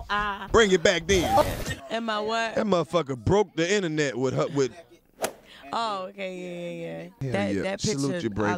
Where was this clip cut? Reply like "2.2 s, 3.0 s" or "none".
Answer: 1.4 s, 7.1 s